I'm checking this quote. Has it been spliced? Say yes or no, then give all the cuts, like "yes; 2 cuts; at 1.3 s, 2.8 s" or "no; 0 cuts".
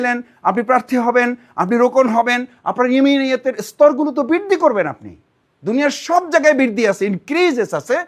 no; 0 cuts